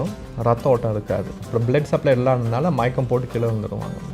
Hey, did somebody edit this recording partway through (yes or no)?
yes